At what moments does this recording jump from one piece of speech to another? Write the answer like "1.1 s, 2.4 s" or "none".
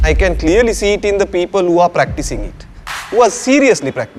none